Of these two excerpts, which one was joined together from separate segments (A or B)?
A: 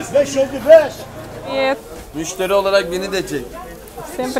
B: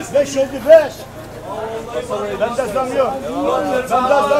A